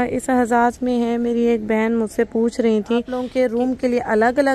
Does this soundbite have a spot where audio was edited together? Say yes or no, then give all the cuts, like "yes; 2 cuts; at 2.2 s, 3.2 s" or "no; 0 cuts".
yes; 1 cut; at 3.3 s